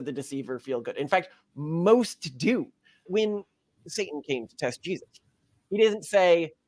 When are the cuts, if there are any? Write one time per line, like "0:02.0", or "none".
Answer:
0:03.1